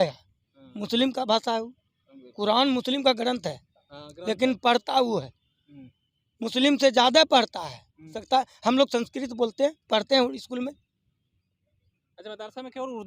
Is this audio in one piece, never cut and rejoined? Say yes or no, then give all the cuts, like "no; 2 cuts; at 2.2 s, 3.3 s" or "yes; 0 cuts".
no; 1 cut; at 8.1 s